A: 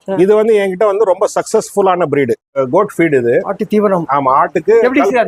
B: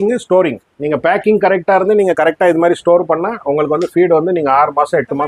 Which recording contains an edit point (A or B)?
A